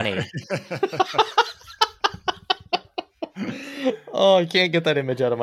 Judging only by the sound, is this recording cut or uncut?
uncut